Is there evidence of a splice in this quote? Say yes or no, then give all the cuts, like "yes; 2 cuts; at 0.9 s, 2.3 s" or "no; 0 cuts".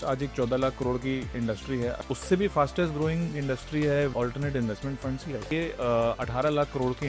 yes; 3 cuts; at 2.0 s, 4.1 s, 5.5 s